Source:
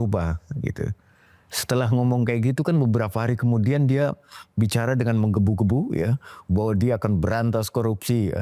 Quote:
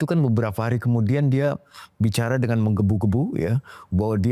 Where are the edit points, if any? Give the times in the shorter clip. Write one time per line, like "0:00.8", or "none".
none